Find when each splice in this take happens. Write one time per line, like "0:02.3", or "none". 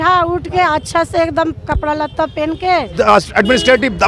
0:02.9

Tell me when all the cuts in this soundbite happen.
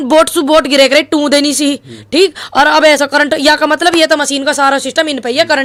none

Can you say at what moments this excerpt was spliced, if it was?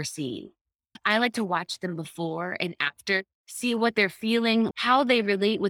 0:00.9
0:04.7

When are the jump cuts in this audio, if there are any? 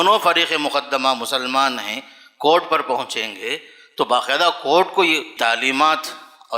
0:05.3

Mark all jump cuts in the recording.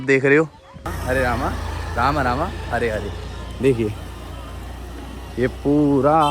0:00.9

